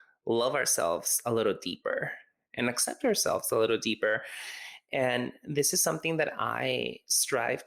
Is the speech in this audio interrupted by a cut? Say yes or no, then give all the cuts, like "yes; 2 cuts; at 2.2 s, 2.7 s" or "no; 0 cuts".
no; 0 cuts